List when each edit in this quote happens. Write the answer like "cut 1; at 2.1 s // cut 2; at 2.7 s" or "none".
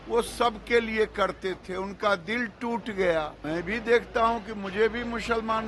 cut 1; at 3.4 s